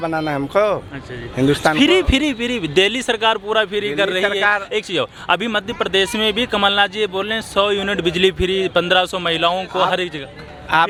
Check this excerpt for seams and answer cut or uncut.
uncut